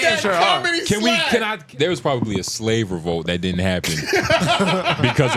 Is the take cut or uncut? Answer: cut